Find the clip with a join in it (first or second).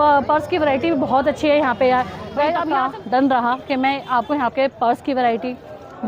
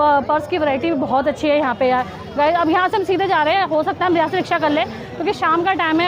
first